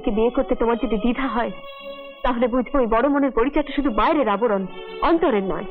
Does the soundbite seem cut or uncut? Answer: uncut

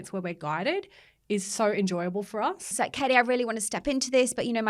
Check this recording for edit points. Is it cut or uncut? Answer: cut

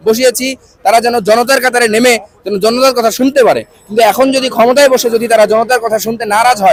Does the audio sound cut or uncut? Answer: uncut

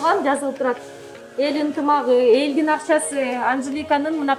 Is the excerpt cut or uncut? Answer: uncut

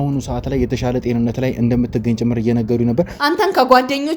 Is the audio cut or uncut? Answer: cut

